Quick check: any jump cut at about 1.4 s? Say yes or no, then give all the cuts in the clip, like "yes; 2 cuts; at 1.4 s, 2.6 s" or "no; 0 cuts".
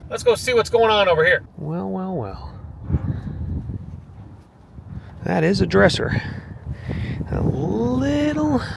no; 0 cuts